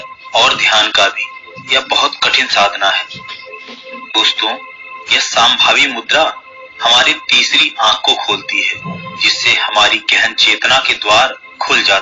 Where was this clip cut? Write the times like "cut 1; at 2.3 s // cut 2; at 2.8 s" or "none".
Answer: none